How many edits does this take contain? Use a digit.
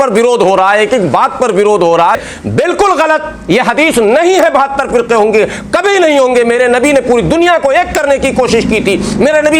1